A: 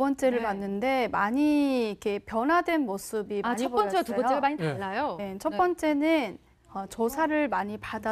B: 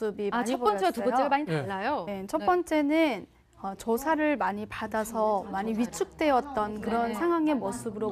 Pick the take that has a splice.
A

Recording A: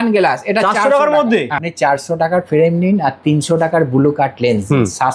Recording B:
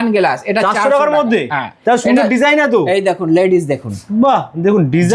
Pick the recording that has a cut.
A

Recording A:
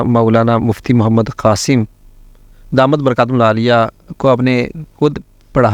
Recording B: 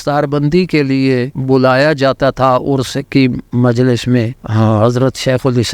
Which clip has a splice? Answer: B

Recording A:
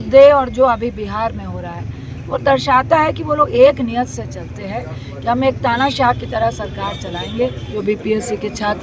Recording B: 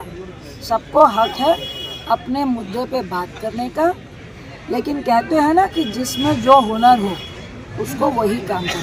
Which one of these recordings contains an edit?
A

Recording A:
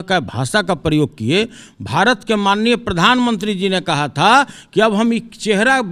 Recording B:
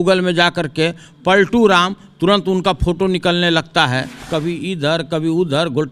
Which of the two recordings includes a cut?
B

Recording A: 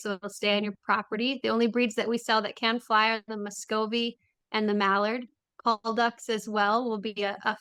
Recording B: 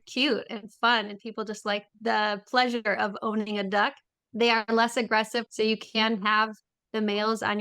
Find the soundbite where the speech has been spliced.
B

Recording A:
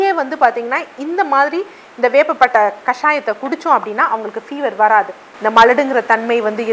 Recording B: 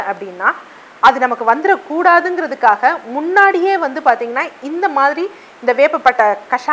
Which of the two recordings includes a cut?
A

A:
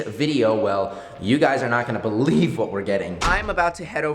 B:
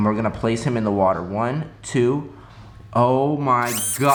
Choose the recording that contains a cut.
A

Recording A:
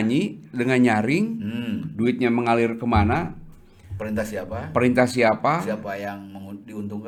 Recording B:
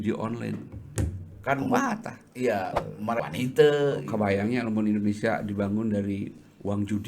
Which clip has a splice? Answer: B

